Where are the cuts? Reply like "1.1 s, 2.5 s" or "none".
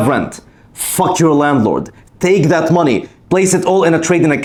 none